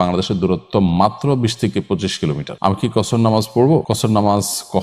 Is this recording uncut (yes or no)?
no